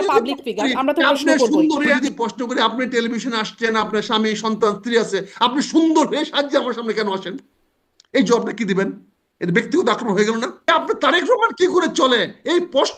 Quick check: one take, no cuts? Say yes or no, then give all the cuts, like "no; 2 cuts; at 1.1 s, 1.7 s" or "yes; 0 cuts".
no; 2 cuts; at 2.0 s, 10.7 s